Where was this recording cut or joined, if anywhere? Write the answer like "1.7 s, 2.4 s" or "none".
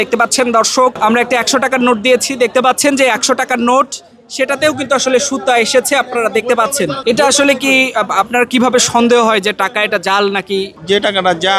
1.0 s, 7.0 s, 10.8 s